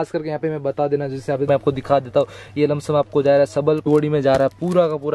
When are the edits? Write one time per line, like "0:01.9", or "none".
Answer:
0:01.5
0:03.9